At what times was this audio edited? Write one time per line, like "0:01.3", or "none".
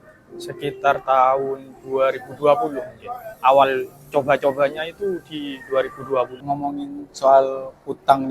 0:06.4

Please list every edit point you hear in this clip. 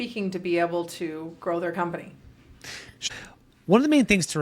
0:03.1

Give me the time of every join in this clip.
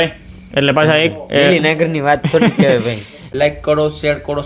0:03.1

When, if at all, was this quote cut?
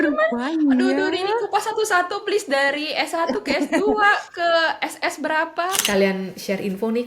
0:05.8

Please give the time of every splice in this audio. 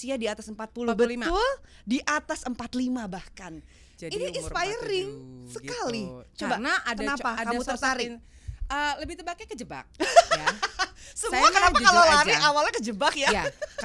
none

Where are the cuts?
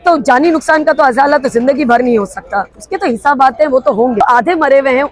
0:04.2

